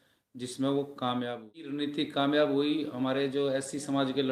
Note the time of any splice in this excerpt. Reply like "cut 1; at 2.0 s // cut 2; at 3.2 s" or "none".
cut 1; at 1.7 s